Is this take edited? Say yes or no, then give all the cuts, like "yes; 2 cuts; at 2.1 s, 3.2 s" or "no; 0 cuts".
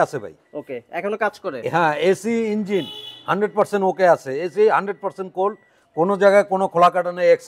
no; 0 cuts